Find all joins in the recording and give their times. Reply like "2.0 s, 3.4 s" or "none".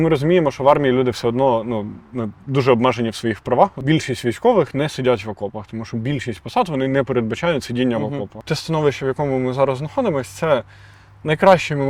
3.8 s, 8.4 s